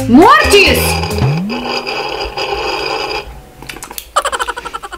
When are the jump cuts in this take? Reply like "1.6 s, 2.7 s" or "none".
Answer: none